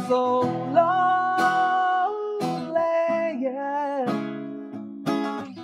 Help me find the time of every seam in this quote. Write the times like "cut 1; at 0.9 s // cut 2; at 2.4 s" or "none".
none

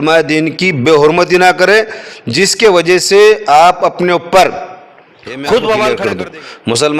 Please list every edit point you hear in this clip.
cut 1; at 5.9 s

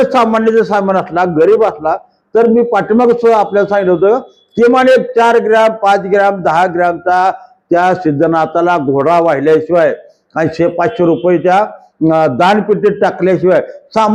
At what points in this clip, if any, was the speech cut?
none

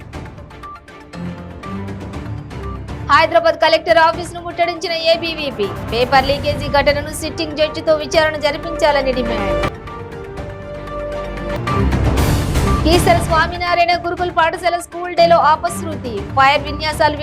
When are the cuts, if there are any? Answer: cut 1; at 1.0 s

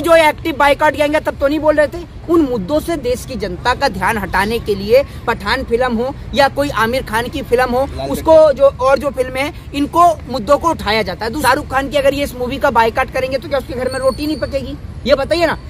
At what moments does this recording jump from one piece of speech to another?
cut 1; at 2.1 s // cut 2; at 11.3 s

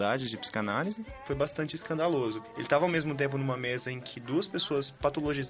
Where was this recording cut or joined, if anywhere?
cut 1; at 1.2 s // cut 2; at 2.4 s

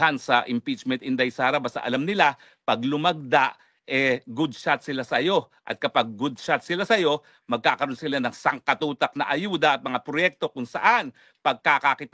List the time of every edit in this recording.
none

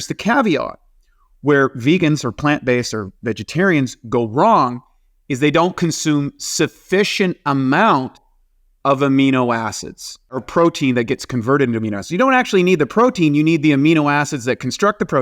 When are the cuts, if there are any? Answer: cut 1; at 10.4 s

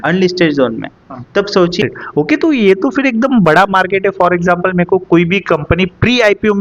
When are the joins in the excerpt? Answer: cut 1; at 1.8 s

